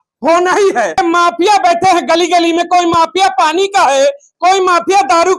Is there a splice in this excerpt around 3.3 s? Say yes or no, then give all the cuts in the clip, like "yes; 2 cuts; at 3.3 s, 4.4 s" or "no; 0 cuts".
no; 1 cut; at 1.0 s